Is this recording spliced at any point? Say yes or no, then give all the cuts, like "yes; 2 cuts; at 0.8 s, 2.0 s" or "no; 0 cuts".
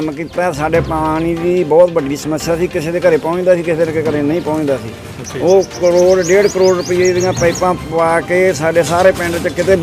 no; 0 cuts